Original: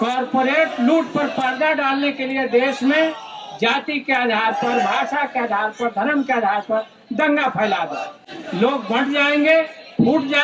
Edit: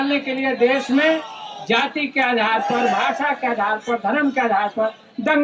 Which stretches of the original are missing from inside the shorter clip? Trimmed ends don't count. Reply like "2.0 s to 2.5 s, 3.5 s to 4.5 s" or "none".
none